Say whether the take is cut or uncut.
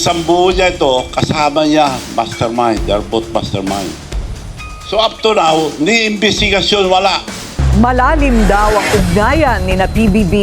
cut